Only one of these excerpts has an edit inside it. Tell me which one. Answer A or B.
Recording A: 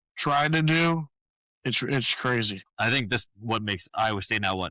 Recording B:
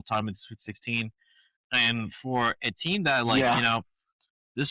A